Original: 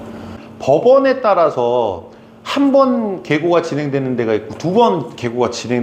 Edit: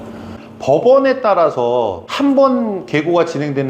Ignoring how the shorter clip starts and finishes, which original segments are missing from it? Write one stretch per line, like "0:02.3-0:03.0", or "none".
0:02.0-0:02.4